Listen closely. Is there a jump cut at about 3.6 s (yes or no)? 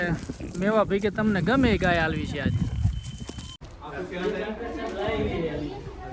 yes